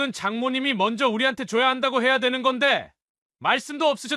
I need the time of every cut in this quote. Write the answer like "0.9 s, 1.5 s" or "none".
none